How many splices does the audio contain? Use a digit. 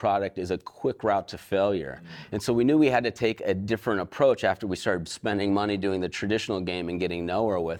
0